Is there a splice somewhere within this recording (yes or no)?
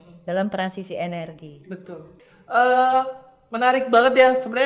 yes